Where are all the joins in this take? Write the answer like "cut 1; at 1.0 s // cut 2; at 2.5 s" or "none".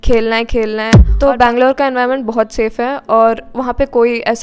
cut 1; at 1.0 s

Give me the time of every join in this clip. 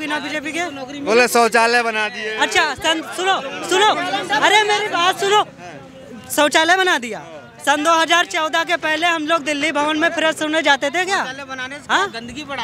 none

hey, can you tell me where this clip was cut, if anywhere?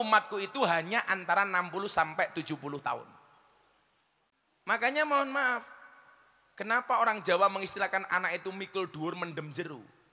cut 1; at 4.3 s

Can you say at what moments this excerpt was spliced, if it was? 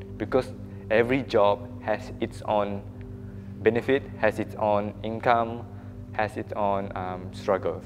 none

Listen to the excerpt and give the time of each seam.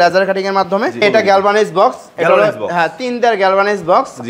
cut 1; at 1.0 s

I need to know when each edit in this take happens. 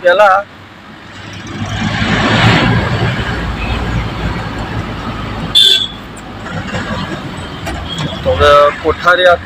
none

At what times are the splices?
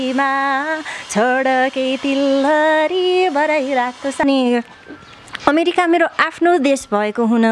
cut 1; at 4.2 s

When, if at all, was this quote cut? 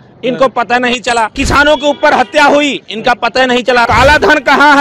cut 1; at 1.3 s // cut 2; at 3.8 s

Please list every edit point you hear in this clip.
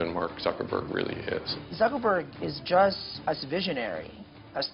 cut 1; at 1.5 s // cut 2; at 3.1 s

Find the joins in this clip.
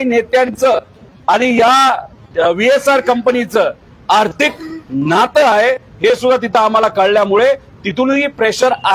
none

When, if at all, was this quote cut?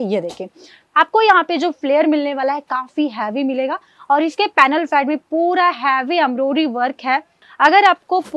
cut 1; at 7.4 s

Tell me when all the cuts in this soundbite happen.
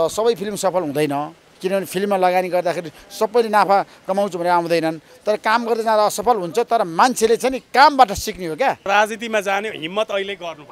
cut 1; at 8.9 s

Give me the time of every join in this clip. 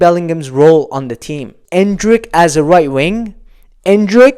cut 1; at 1.5 s

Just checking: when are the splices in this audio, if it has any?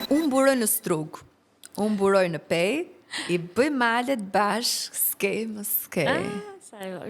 none

